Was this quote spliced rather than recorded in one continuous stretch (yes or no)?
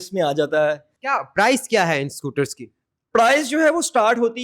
yes